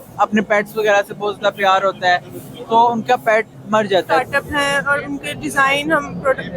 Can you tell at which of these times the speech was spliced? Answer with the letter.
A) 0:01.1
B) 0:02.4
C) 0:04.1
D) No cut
C